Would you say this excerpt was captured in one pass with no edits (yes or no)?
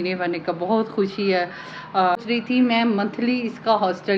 no